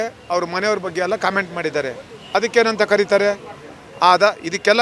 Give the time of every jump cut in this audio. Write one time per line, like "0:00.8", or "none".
none